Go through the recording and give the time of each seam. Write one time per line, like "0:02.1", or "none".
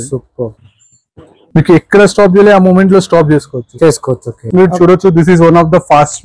0:04.4

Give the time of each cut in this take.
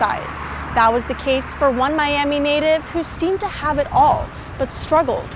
none

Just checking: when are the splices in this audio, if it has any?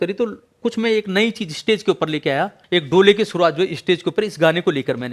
0:02.6

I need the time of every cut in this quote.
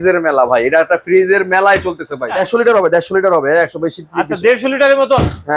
0:02.4

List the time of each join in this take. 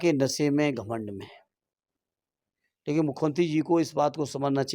none

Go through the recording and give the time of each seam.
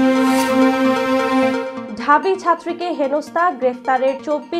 0:01.6

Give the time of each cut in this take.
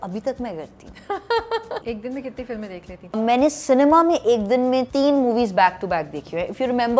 0:01.8
0:03.2
0:04.9

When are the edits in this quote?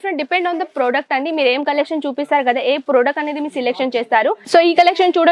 0:04.4

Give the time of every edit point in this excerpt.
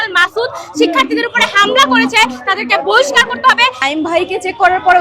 0:03.8

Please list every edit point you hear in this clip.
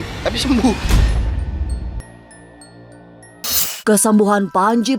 none

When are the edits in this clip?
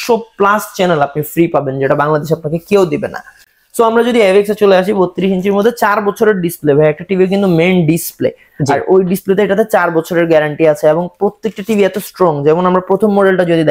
none

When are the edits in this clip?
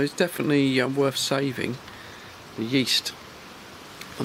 none

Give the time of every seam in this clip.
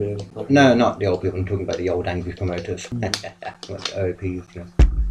0:02.9

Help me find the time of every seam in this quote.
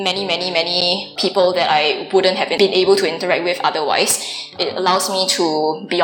0:01.2
0:02.5
0:04.5

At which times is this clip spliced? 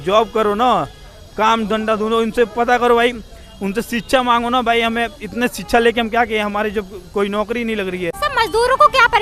0:08.2

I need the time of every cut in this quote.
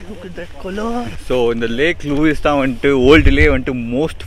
none

